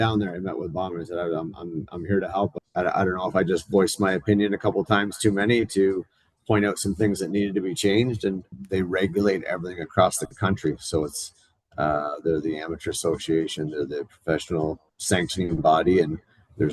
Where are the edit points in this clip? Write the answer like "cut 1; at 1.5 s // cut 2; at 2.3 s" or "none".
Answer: cut 1; at 2.6 s // cut 2; at 8.5 s // cut 3; at 14.9 s

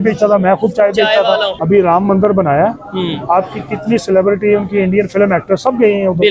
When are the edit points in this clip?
cut 1; at 1.5 s

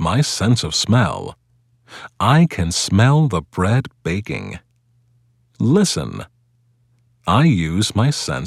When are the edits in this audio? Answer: cut 1; at 1.7 s // cut 2; at 4.8 s // cut 3; at 6.5 s

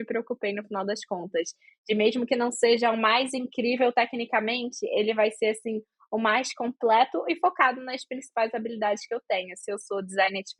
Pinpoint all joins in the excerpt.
none

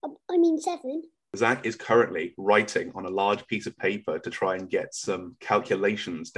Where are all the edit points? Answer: cut 1; at 1.3 s

